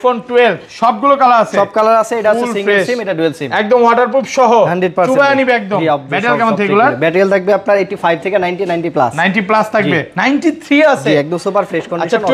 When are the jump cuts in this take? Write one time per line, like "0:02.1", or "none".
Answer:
none